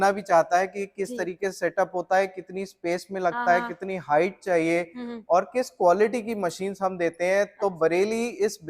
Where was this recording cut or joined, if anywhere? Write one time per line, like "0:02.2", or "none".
none